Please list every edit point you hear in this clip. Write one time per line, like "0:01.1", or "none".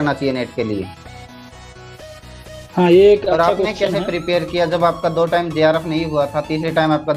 none